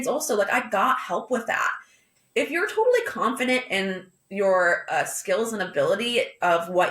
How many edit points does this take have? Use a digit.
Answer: 1